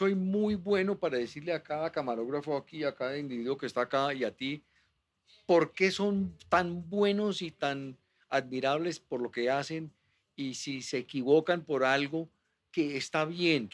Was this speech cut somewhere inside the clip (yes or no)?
no